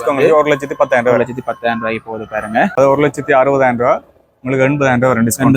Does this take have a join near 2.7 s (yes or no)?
yes